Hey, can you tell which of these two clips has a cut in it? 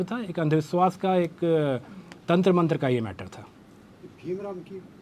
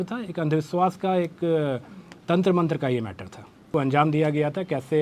second; 1 cut; at 3.7 s

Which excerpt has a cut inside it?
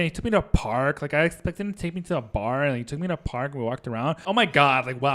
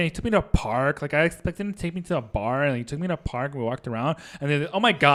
first; 1 cut; at 4.2 s

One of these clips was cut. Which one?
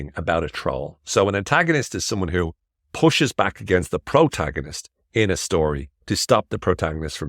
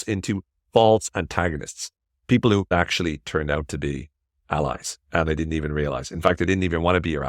second; 1 cut; at 2.7 s

